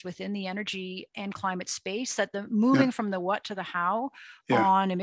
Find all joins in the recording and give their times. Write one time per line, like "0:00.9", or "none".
0:01.1